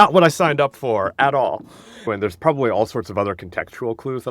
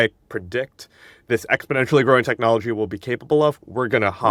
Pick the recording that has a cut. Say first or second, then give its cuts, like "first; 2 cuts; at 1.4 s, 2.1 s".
first; 1 cut; at 2.1 s